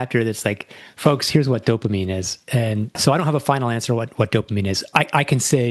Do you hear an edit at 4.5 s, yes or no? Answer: no